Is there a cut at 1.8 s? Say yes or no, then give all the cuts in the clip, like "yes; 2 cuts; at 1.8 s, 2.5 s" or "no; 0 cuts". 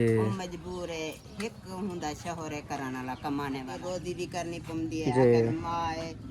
no; 1 cut; at 3.7 s